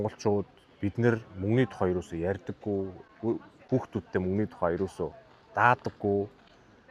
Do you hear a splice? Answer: no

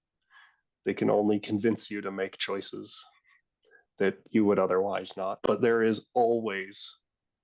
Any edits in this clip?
yes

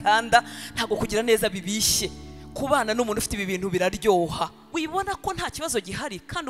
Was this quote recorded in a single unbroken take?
no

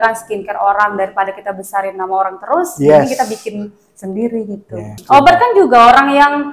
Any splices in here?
yes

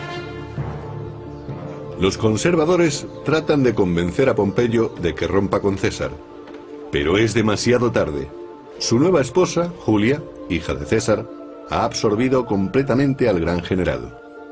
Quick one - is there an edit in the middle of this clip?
no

